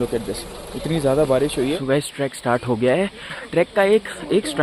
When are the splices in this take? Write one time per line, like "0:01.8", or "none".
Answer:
0:01.8
0:03.4

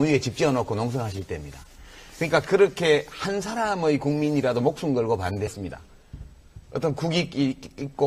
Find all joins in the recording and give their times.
none

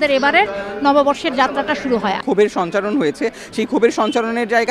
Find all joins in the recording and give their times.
0:02.2

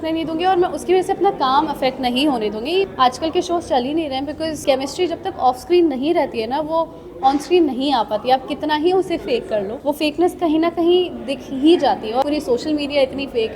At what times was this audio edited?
0:02.9
0:04.6
0:09.7
0:12.2

